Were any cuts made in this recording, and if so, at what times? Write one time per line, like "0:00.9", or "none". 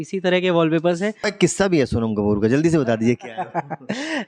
0:01.3